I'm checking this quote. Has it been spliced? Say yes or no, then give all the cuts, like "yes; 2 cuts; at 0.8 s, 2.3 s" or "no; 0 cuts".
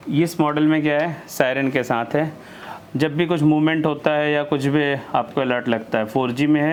no; 0 cuts